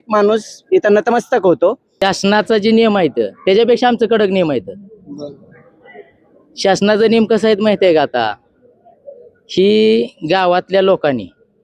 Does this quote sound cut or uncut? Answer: cut